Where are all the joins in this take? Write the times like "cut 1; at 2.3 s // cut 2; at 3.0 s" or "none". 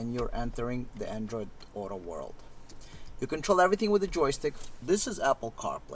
cut 1; at 4.8 s